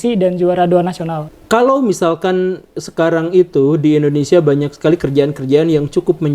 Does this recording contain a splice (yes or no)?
yes